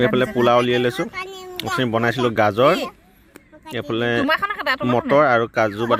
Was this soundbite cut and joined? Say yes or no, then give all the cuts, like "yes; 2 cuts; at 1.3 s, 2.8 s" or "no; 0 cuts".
no; 0 cuts